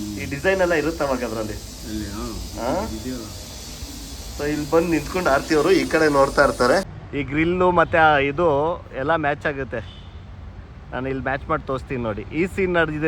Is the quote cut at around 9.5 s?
no; 1 cut; at 7.0 s

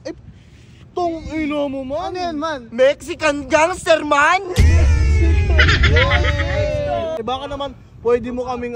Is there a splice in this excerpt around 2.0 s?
no; 1 cut; at 7.2 s

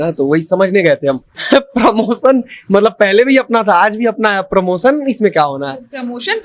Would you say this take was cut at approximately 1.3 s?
yes; 1 cut; at 1.3 s

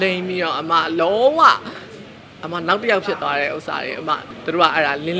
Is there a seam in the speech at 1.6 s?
no; 1 cut; at 4.3 s

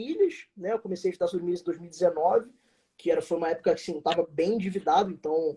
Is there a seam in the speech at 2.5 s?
no; 0 cuts

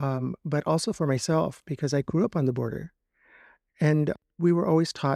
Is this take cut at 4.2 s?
yes; 1 cut; at 4.2 s

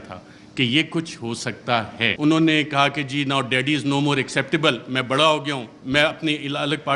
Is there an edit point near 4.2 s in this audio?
no; 1 cut; at 2.0 s

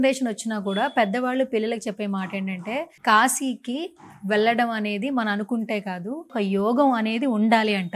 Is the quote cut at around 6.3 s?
yes; 2 cuts; at 2.9 s, 6.3 s

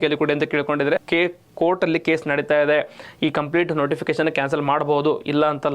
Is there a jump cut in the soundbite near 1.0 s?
yes; 1 cut; at 1.0 s

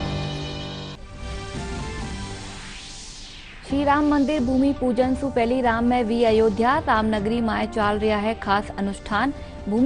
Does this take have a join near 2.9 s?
no; 1 cut; at 1.0 s

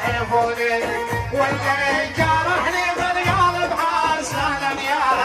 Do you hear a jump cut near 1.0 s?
no; 0 cuts

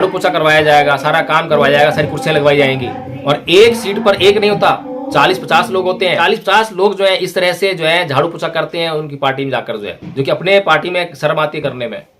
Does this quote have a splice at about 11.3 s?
no; 1 cut; at 6.2 s

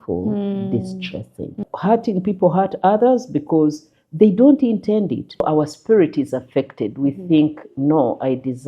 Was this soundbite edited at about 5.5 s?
yes; 2 cuts; at 1.7 s, 5.5 s

